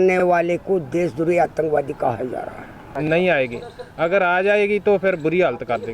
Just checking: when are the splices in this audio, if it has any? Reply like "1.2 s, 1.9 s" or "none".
3.1 s